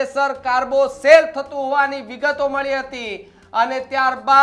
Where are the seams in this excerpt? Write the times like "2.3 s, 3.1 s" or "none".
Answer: none